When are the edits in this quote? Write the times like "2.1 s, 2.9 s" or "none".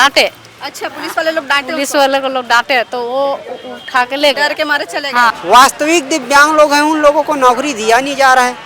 5.3 s